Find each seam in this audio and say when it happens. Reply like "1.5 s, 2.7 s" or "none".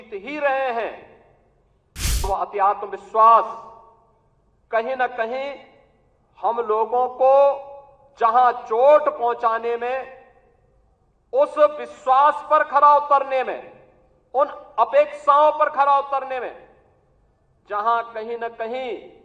2.2 s